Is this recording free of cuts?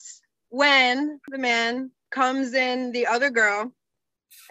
no; 1 cut; at 1.3 s

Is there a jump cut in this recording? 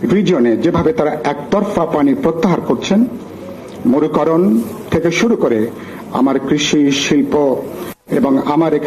no; 0 cuts

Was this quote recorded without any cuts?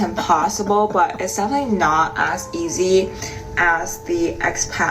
yes; 0 cuts

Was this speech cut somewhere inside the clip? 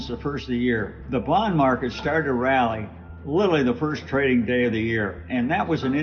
no; 0 cuts

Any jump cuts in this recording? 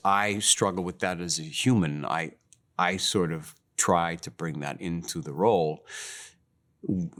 no; 0 cuts

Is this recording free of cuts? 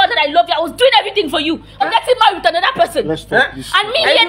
no; 1 cut; at 1.8 s

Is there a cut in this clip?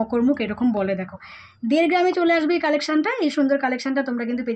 no; 0 cuts

